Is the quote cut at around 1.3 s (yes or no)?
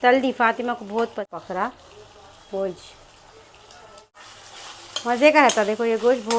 yes